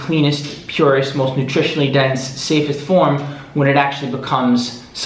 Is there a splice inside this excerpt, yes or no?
no